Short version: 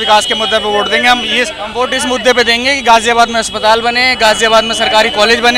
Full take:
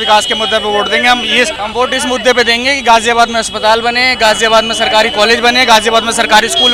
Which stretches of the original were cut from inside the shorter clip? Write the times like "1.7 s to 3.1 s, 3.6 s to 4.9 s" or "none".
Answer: none